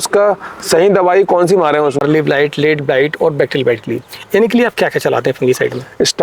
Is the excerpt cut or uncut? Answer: cut